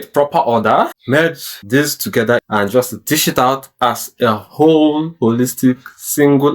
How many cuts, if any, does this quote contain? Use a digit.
2